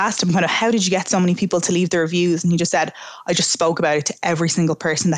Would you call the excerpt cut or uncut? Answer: uncut